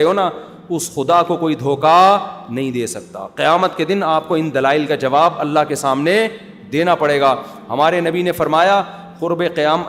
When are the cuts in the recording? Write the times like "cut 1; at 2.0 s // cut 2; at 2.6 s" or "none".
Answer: none